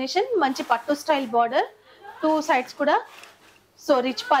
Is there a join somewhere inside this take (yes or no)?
no